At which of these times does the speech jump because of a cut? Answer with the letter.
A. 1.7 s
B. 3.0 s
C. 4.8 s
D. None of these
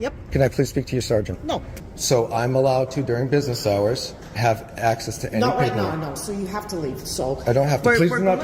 A